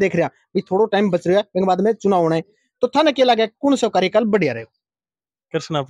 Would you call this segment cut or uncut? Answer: uncut